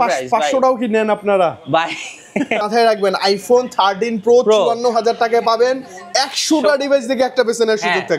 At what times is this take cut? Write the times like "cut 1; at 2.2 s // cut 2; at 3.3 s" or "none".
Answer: cut 1; at 2.6 s